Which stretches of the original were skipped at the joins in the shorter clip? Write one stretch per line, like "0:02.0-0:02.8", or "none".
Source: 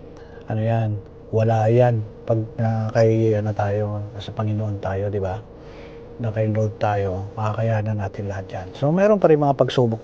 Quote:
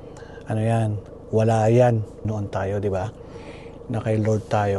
0:02.1-0:04.4